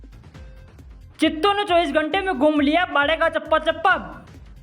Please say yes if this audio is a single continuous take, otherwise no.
no